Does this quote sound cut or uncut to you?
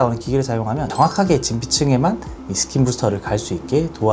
uncut